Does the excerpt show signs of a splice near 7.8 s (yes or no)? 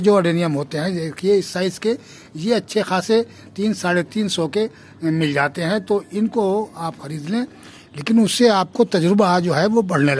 yes